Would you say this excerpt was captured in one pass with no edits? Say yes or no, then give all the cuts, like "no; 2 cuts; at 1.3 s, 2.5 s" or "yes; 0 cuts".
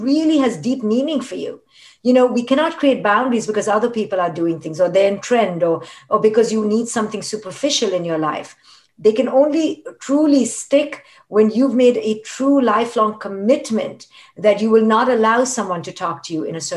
yes; 0 cuts